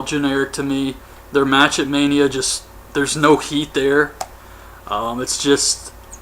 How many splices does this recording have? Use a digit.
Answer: 1